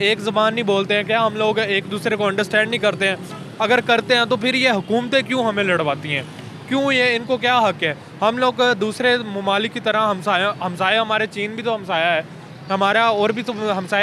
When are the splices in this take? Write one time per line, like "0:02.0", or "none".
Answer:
none